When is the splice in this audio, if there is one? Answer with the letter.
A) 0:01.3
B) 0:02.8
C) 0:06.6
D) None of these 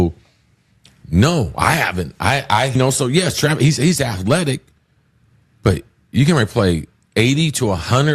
B